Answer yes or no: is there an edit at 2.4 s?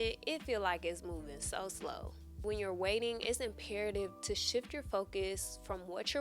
yes